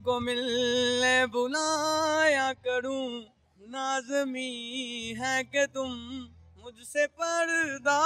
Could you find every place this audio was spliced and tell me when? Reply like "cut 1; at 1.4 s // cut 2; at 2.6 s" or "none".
none